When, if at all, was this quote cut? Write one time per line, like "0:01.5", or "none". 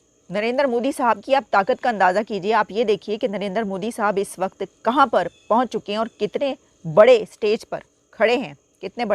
none